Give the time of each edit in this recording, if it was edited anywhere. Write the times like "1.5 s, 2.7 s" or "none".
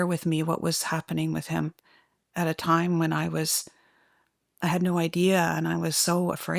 none